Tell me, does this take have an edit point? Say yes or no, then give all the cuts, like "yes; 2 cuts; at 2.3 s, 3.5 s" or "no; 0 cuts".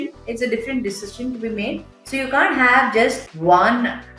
yes; 1 cut; at 3.3 s